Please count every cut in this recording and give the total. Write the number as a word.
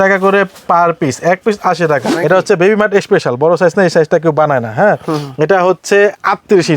one